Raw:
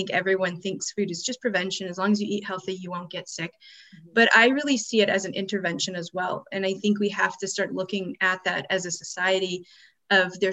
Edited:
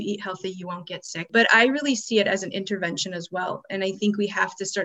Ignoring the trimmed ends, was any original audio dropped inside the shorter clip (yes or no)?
yes